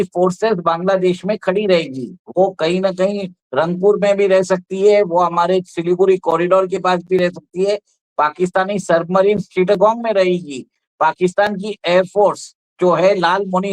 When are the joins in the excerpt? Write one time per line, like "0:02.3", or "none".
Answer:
none